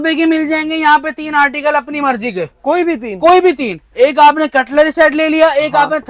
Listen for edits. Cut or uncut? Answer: uncut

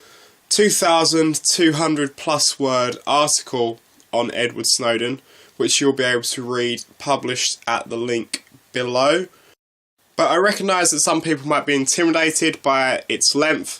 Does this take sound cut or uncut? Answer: cut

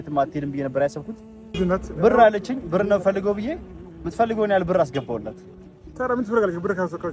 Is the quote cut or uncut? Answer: cut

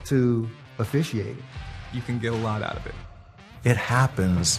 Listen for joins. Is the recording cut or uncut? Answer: uncut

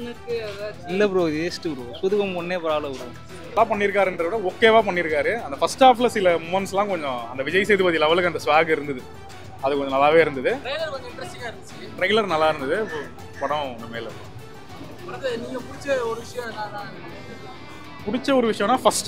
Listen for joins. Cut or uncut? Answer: cut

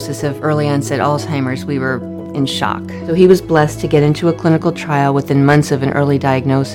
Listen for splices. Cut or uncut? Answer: cut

